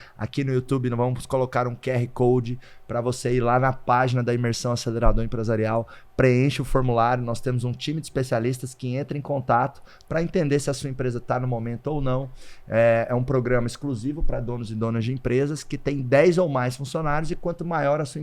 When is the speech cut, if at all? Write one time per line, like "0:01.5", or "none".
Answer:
none